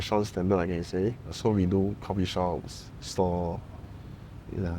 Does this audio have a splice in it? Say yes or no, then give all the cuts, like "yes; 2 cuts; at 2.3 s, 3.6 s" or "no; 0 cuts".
yes; 1 cut; at 1.3 s